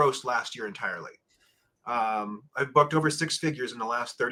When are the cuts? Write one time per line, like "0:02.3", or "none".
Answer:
none